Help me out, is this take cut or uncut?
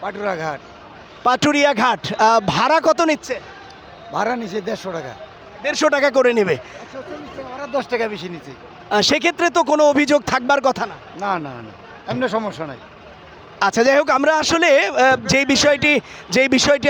uncut